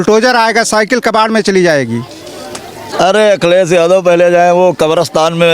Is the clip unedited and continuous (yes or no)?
no